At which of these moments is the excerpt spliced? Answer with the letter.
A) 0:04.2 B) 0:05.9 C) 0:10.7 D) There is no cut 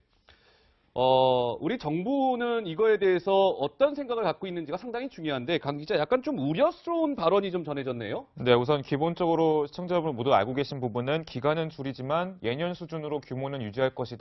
D